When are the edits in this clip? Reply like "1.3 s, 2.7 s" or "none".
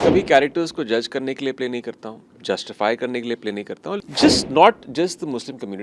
4.0 s